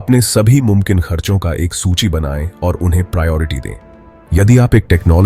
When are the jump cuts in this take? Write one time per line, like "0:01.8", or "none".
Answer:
0:04.1